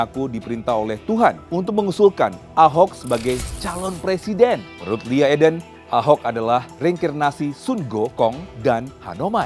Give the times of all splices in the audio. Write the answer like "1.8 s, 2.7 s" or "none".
1.4 s, 4.7 s, 5.7 s, 6.7 s, 8.5 s